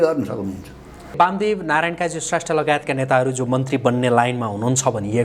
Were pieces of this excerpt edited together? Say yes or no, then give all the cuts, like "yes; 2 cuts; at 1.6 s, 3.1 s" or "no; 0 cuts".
yes; 1 cut; at 1.2 s